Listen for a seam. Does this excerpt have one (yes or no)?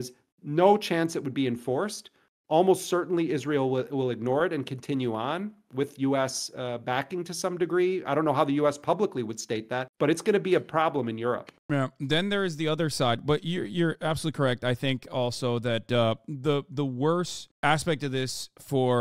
no